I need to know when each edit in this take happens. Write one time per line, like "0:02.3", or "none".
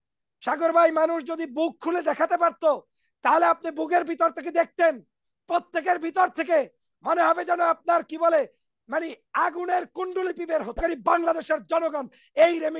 0:10.8